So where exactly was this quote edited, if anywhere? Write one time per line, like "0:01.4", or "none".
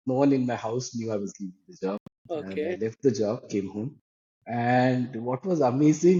none